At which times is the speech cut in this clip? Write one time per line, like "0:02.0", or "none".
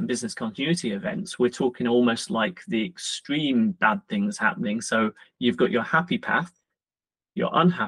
none